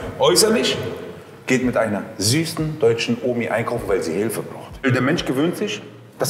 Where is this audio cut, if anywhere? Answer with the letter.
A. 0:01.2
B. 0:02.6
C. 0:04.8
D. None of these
C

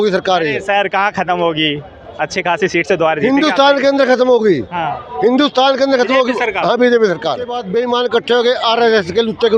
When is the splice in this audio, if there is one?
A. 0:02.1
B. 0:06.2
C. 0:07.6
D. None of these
C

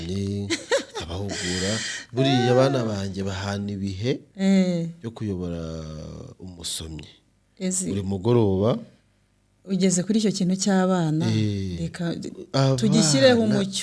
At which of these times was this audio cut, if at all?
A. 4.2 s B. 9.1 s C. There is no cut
C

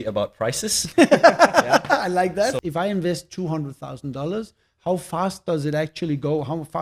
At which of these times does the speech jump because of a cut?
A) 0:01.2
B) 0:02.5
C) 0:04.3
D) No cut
B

